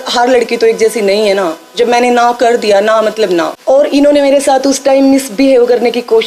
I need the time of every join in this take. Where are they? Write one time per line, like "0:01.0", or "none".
0:03.5